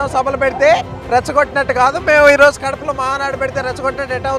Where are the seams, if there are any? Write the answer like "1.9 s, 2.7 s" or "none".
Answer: none